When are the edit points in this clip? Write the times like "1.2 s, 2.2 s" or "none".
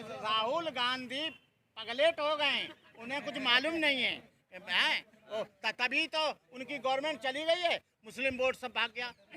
none

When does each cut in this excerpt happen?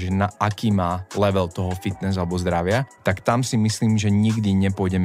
2.9 s

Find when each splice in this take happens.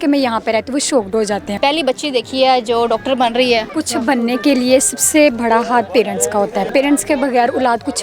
1.6 s, 3.8 s, 6.7 s

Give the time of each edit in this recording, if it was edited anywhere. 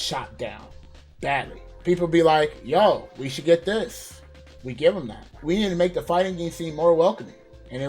5.3 s

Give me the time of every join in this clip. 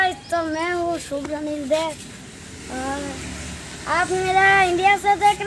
none

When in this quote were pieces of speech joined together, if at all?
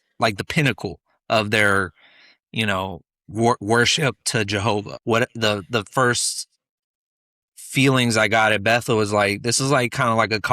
4.9 s

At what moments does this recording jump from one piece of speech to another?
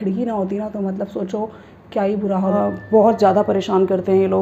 2.5 s

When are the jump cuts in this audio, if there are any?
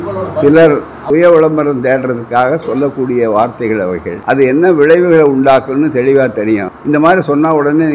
0.9 s, 4.1 s, 6.7 s

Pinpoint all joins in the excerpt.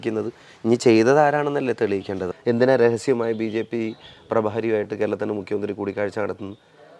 2.3 s

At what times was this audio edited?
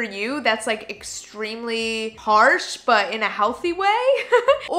none

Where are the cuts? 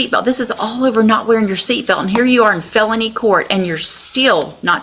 none

